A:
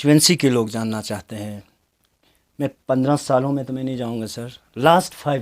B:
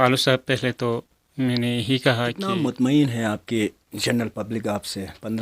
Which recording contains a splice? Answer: B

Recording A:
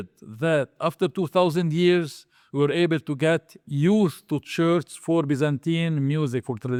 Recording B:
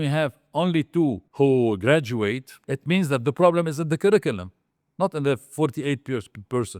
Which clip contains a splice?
B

